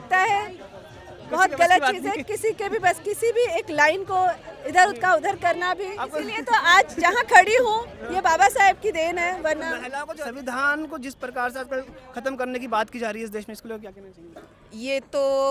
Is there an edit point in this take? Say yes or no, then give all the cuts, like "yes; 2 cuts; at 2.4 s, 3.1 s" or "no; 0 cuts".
yes; 2 cuts; at 6.3 s, 9.9 s